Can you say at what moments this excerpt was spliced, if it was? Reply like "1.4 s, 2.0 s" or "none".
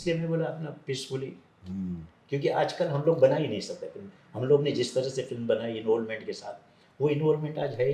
none